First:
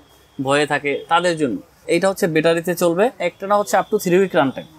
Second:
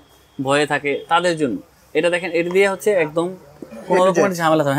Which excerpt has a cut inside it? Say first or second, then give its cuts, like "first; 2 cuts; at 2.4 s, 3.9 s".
first; 2 cuts; at 1.8 s, 3.3 s